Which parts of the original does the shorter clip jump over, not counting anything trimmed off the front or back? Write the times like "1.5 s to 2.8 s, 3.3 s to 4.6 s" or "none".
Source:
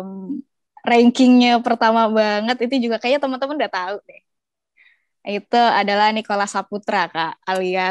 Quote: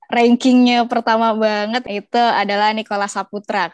2.6 s to 5.2 s